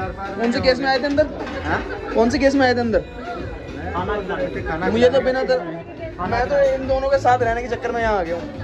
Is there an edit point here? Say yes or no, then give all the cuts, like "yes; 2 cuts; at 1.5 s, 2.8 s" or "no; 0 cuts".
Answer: no; 0 cuts